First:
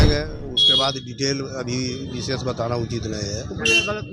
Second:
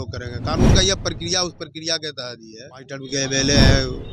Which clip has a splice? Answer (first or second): second